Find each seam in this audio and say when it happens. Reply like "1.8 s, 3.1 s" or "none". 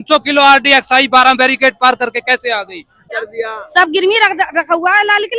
3.0 s